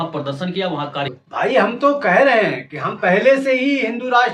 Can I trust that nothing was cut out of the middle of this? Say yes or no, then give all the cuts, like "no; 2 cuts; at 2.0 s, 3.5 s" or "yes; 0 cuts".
no; 1 cut; at 1.1 s